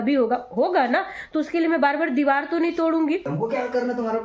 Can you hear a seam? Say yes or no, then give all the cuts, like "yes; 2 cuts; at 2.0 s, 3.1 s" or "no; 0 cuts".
yes; 1 cut; at 3.3 s